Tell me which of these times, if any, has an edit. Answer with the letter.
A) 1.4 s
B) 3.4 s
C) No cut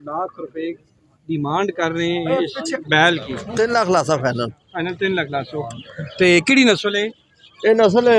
B